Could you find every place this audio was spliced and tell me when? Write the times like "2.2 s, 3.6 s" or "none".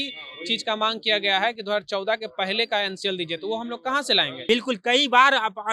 4.4 s